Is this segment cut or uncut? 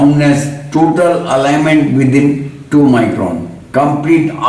uncut